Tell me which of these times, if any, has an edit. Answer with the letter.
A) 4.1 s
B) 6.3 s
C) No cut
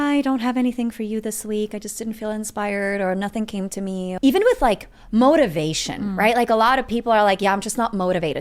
A